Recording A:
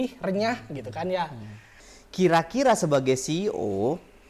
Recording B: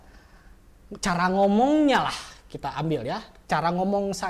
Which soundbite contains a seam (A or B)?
A